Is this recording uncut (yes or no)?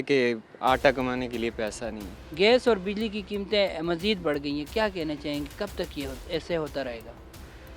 yes